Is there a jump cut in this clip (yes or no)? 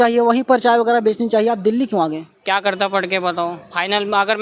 yes